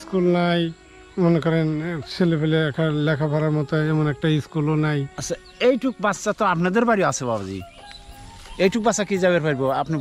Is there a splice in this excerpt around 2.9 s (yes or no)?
no